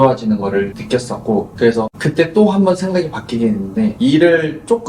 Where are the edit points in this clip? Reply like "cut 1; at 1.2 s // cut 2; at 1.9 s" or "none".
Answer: cut 1; at 1.0 s // cut 2; at 3.9 s